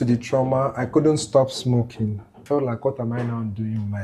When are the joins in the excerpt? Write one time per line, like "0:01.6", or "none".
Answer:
0:02.4